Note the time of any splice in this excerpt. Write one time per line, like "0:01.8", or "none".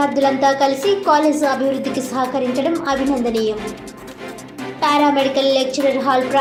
none